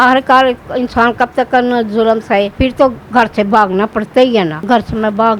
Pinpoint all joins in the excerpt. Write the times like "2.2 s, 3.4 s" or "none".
2.5 s, 4.7 s